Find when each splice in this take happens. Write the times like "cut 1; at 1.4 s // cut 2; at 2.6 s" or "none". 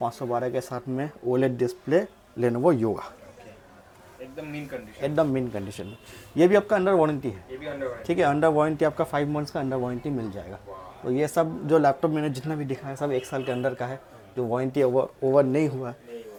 none